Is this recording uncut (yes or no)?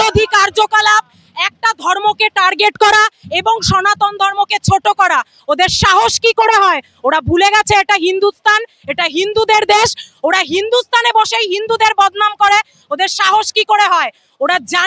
yes